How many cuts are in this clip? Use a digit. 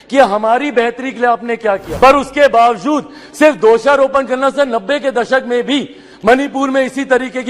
1